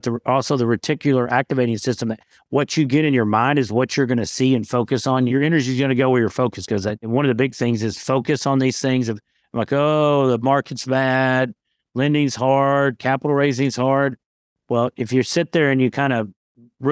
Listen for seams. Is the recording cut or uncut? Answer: cut